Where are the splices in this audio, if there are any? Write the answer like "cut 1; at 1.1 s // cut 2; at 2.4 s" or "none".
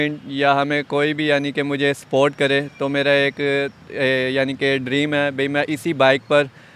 none

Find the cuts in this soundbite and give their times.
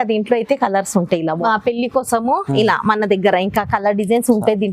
cut 1; at 1.4 s

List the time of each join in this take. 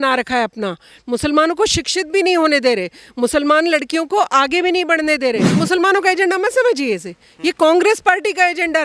cut 1; at 5.6 s

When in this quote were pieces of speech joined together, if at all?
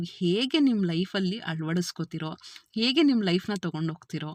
none

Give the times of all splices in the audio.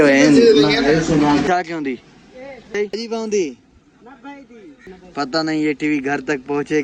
cut 1; at 1.4 s // cut 2; at 2.8 s // cut 3; at 4.9 s

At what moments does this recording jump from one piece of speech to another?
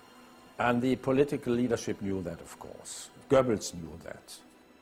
none

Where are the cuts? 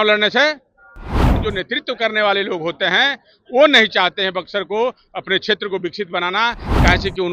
cut 1; at 1.3 s

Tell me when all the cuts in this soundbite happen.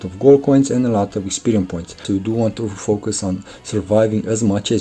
cut 1; at 2.0 s

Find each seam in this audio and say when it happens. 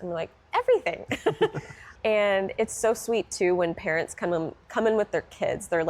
cut 1; at 1.8 s

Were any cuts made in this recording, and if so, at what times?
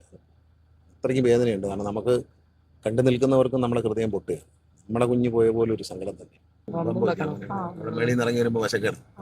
cut 1; at 6.5 s

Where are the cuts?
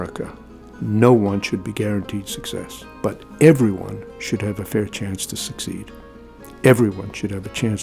cut 1; at 2.8 s

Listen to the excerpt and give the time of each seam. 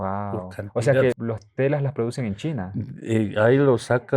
cut 1; at 1.2 s

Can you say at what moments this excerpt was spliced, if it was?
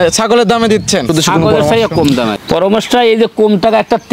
cut 1; at 2.4 s

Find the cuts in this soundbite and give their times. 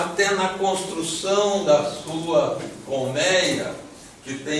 cut 1; at 2.7 s

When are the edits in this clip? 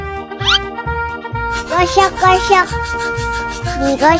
cut 1; at 1.7 s // cut 2; at 3.1 s

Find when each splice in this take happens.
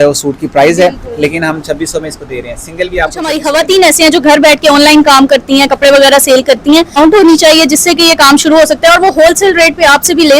cut 1; at 3.3 s // cut 2; at 7.0 s

